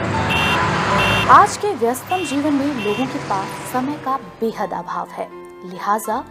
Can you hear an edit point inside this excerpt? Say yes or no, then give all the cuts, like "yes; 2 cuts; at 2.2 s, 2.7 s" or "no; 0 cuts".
no; 0 cuts